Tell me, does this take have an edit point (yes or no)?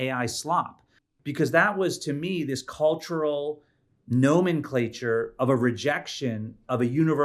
no